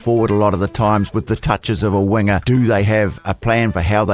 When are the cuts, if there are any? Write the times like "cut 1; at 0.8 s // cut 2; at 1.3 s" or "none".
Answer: cut 1; at 2.4 s